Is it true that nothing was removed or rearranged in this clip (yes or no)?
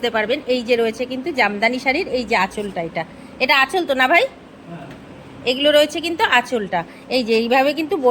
yes